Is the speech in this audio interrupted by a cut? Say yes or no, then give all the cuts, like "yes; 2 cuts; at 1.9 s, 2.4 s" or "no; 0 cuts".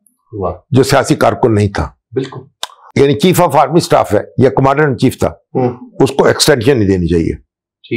yes; 1 cut; at 2.8 s